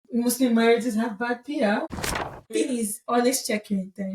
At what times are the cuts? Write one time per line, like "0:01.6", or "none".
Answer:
0:02.5